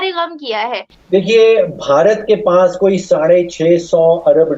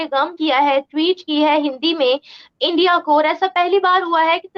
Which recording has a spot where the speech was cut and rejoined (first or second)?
first